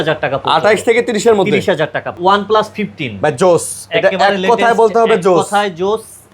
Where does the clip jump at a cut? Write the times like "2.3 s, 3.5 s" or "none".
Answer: 2.2 s